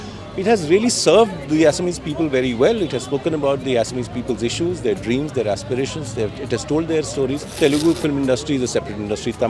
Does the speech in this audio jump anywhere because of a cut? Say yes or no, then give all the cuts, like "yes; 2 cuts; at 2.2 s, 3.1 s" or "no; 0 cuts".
yes; 1 cut; at 7.6 s